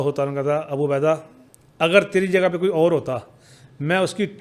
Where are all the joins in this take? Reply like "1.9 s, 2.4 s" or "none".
none